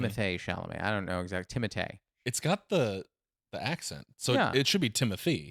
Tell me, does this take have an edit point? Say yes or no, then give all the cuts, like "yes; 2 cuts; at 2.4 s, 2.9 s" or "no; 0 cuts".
yes; 1 cut; at 2.1 s